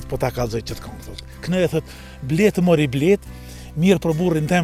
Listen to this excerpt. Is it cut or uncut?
uncut